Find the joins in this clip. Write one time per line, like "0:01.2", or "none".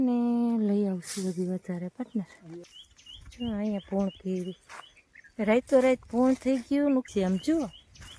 0:02.7
0:07.1